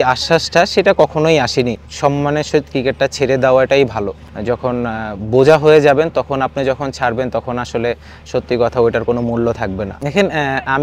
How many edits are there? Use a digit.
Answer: 3